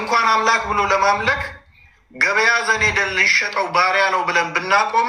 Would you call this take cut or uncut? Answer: uncut